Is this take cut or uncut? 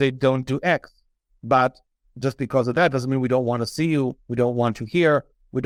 uncut